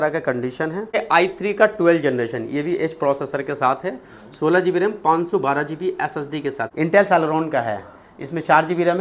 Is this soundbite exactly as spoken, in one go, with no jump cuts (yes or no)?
no